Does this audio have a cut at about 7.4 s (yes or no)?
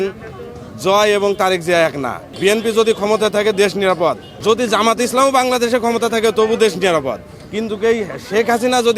no